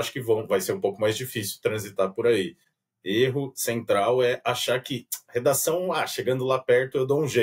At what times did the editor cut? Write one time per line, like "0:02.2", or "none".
0:02.6